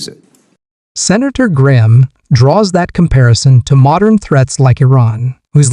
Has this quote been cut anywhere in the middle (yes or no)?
no